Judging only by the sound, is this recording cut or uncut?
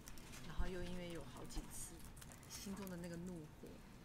cut